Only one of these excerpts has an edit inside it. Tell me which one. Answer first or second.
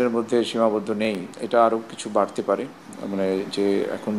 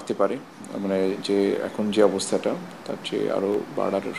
first